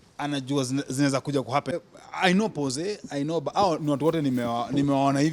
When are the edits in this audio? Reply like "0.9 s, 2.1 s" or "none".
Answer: 1.7 s